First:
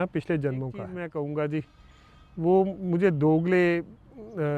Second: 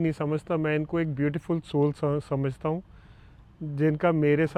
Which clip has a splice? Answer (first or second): first